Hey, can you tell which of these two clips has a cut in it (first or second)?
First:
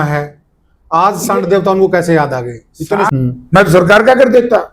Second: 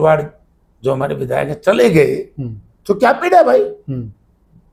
first